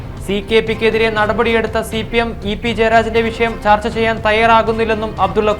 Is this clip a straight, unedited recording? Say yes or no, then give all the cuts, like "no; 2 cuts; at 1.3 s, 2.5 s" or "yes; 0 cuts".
yes; 0 cuts